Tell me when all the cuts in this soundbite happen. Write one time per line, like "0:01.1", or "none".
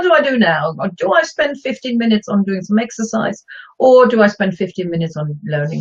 0:02.3